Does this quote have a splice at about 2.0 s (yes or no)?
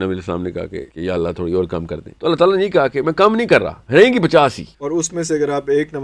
yes